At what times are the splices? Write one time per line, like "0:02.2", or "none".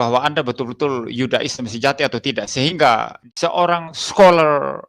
0:03.2